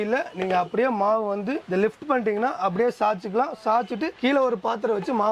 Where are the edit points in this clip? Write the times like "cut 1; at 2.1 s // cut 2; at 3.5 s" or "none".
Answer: none

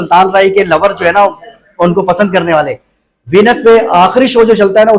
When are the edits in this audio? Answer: none

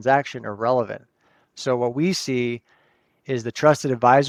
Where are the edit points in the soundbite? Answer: none

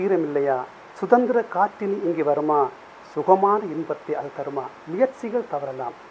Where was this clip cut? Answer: cut 1; at 4.7 s

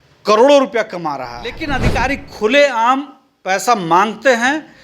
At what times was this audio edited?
cut 1; at 1.7 s

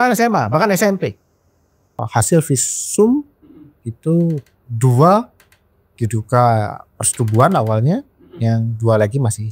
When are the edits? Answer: cut 1; at 2.0 s

